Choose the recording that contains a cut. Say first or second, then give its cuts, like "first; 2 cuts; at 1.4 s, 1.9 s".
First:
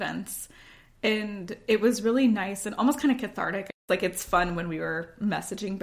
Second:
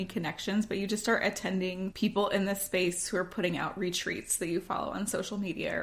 first; 1 cut; at 3.7 s